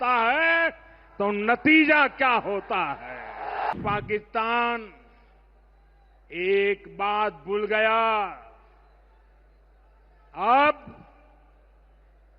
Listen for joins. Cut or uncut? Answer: cut